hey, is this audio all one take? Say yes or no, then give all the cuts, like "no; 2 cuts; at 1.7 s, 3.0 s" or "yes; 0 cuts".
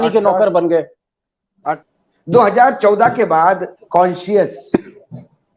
yes; 0 cuts